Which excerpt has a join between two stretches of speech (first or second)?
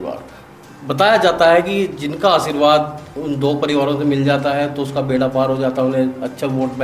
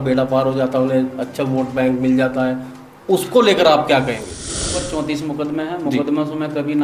second